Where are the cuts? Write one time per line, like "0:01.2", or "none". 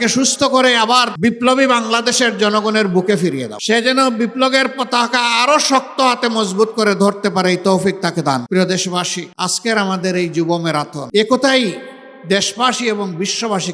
0:01.1
0:03.5
0:08.4
0:09.2
0:11.0